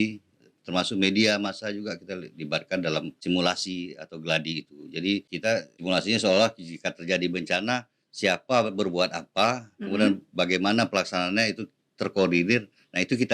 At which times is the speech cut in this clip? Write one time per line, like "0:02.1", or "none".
0:03.2
0:05.8